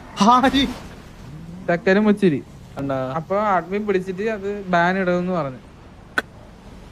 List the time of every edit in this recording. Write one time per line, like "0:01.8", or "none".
0:02.8